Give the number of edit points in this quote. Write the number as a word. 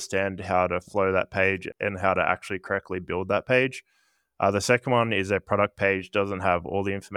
zero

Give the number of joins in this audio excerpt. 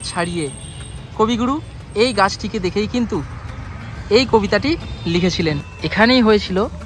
one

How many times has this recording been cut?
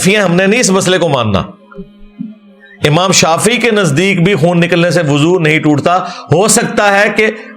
zero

